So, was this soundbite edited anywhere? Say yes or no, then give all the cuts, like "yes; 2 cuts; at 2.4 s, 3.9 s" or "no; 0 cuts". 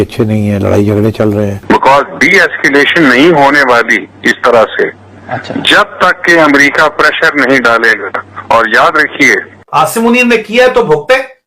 yes; 2 cuts; at 1.6 s, 9.5 s